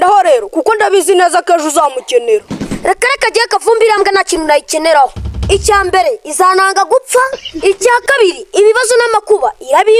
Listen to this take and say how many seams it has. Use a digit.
0